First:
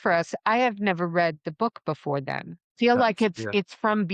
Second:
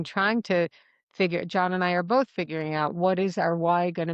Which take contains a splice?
first; 1 cut; at 2.7 s

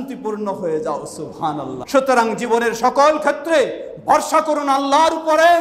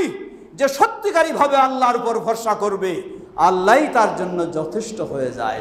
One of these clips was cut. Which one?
first; 1 cut; at 1.8 s

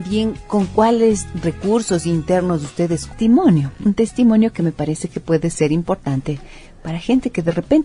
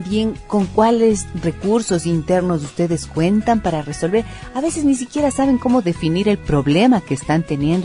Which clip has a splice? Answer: second; 1 cut; at 3.1 s

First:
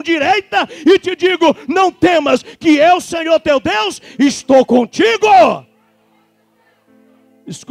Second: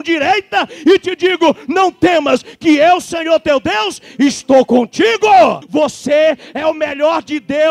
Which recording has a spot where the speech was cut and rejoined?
second; 1 cut; at 5.6 s

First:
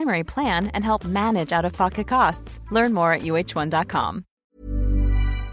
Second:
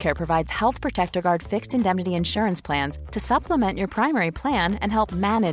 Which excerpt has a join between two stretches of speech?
first; 1 cut; at 4.3 s

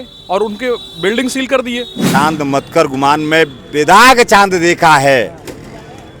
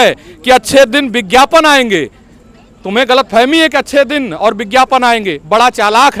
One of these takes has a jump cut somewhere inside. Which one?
first; 1 cut; at 2.1 s

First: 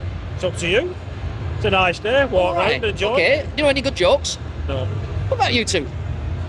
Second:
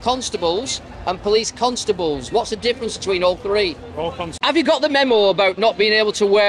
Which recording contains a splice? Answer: second; 1 cut; at 4.3 s

